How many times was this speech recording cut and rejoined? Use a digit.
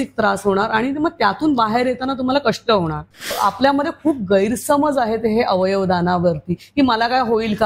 1